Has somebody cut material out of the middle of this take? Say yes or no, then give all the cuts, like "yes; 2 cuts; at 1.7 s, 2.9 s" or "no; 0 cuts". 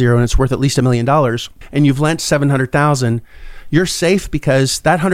no; 0 cuts